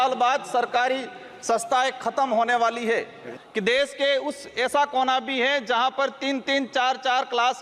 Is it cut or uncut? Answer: cut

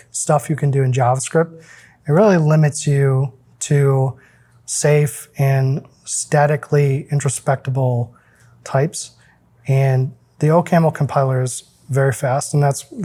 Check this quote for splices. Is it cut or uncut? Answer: uncut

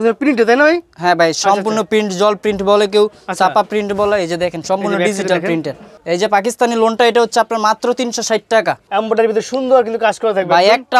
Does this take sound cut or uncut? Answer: cut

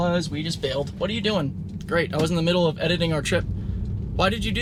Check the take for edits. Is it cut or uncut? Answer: uncut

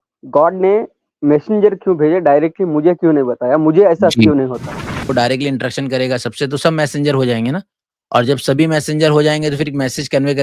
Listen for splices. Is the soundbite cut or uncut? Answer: cut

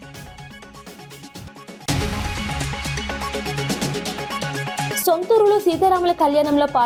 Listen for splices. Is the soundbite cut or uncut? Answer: uncut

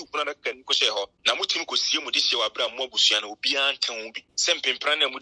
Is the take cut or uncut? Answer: cut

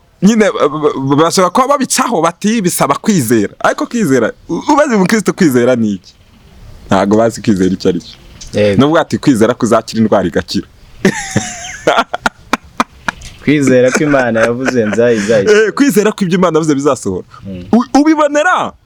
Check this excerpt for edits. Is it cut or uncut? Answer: uncut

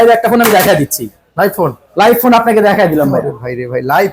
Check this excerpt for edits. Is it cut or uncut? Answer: uncut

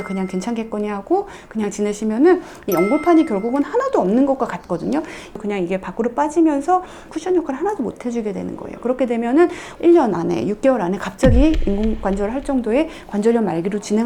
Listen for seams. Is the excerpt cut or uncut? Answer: cut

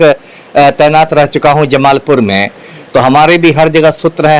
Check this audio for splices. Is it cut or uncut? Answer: uncut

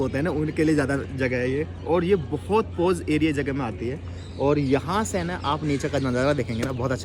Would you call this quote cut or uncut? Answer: uncut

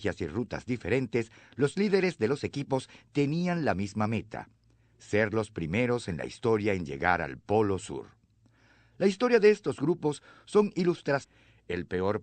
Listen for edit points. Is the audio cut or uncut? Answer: uncut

